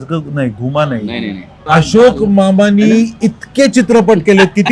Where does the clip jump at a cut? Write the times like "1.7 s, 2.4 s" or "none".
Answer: 1.6 s